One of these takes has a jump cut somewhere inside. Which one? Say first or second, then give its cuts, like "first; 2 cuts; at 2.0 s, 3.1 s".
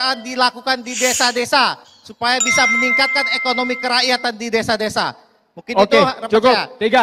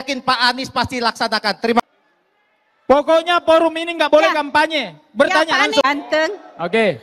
second; 2 cuts; at 1.8 s, 5.8 s